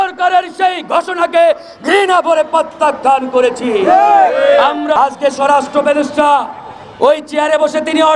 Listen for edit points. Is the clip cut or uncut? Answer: cut